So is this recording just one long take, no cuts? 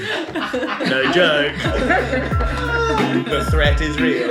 yes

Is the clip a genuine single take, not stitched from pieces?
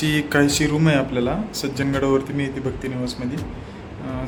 yes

